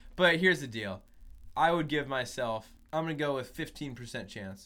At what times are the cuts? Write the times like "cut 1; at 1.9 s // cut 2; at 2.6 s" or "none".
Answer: cut 1; at 2.8 s